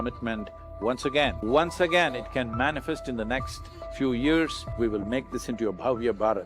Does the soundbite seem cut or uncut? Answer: cut